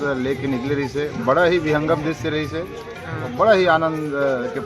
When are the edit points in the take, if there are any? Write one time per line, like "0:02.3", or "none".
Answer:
none